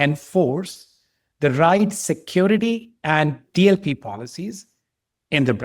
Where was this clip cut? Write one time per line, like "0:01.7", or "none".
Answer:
0:03.4